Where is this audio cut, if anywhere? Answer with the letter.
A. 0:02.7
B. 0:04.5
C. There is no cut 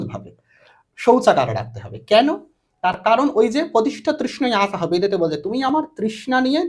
C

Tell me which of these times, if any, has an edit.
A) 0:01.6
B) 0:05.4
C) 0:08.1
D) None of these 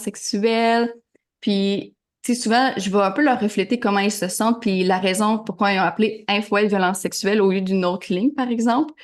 D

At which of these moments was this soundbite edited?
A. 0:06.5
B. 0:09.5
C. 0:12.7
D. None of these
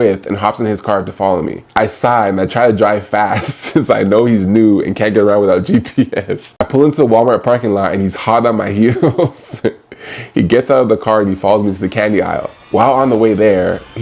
A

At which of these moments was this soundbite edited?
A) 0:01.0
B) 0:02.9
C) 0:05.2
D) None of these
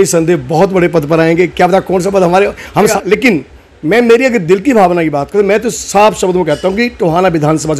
B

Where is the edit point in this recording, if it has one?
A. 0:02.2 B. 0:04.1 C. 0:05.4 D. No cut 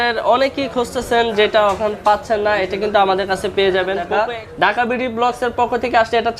B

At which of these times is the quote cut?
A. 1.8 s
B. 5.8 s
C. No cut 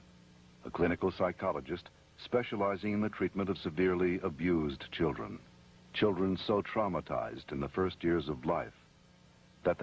C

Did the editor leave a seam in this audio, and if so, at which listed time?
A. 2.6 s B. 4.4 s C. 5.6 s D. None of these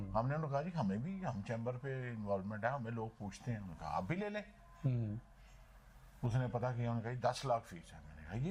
D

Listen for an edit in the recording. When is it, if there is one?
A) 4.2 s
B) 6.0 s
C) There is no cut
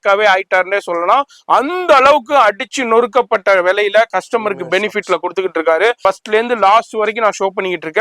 B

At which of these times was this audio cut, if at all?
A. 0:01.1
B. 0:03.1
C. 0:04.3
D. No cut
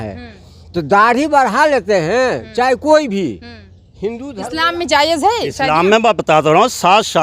C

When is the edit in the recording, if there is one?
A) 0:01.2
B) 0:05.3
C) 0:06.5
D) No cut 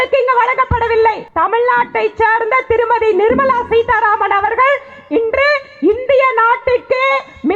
A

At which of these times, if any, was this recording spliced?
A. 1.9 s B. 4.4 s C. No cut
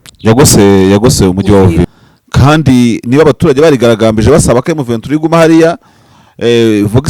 A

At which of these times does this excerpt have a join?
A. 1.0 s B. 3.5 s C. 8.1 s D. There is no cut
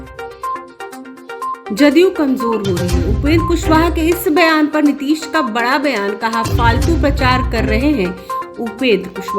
A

